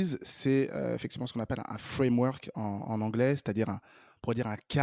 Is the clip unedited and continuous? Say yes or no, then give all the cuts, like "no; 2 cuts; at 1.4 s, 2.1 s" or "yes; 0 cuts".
yes; 0 cuts